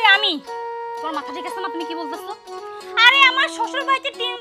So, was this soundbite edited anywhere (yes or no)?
no